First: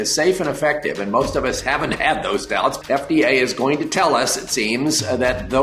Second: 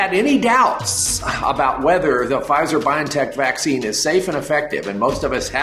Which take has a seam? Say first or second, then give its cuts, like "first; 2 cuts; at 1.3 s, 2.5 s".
first; 1 cut; at 2.8 s